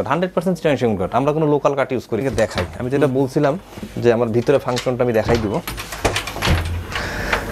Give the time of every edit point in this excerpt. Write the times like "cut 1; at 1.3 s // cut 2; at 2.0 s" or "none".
cut 1; at 2.2 s